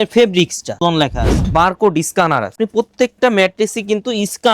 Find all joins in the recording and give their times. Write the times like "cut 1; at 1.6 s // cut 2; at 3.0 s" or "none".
cut 1; at 0.9 s